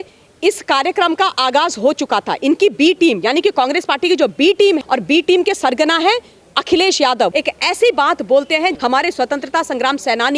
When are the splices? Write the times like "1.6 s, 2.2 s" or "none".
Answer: 4.8 s, 7.3 s, 8.8 s